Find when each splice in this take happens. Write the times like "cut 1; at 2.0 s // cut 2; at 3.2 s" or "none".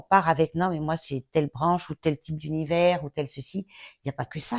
none